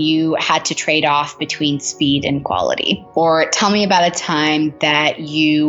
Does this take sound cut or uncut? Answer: cut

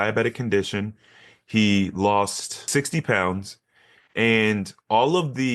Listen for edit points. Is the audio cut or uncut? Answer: cut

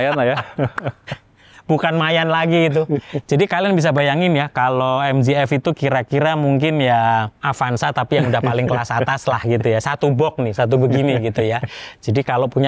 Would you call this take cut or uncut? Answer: uncut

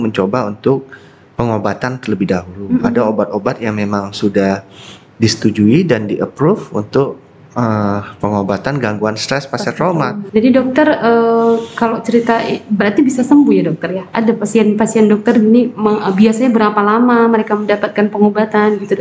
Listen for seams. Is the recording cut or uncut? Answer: cut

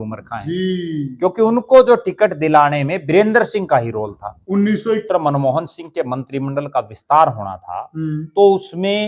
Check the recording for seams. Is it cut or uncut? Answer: cut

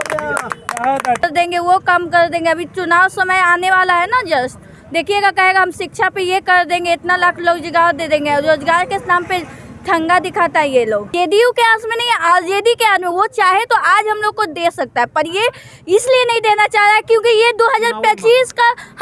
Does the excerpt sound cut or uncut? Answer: cut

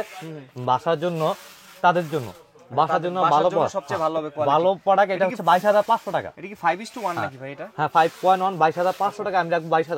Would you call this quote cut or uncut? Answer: uncut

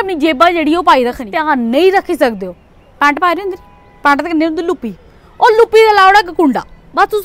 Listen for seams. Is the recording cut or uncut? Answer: cut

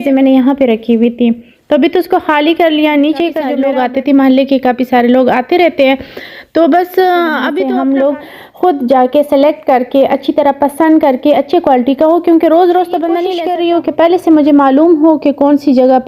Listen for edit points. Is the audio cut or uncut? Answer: cut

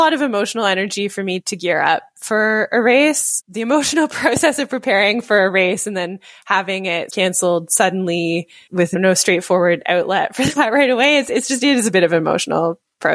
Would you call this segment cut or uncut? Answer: cut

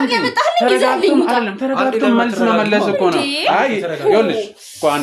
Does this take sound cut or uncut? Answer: uncut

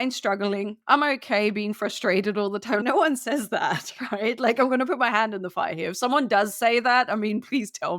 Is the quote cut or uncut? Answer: cut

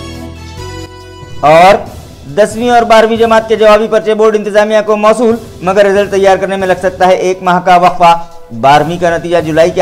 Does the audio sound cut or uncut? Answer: cut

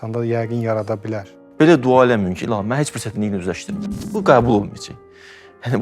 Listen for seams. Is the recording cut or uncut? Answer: cut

